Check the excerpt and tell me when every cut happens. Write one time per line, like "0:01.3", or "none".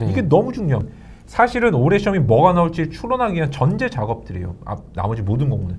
0:00.9